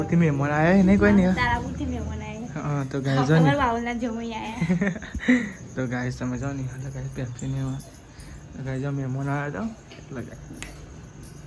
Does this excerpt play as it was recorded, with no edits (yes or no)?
yes